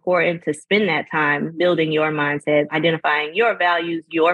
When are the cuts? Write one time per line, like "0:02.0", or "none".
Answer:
0:01.5
0:02.7